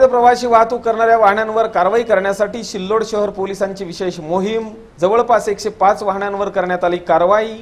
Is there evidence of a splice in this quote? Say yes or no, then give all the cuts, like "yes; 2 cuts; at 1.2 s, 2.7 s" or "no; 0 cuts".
no; 0 cuts